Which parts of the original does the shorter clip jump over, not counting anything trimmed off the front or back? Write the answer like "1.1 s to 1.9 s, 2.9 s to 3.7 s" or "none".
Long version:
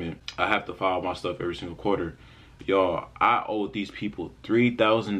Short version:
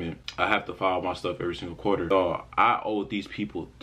2.1 s to 2.7 s